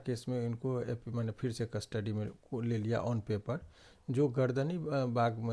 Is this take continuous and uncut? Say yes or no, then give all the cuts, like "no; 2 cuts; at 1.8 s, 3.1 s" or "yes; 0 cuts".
yes; 0 cuts